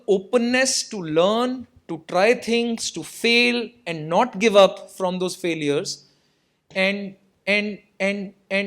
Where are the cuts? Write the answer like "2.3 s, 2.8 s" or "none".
none